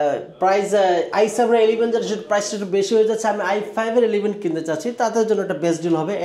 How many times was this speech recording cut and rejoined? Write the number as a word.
zero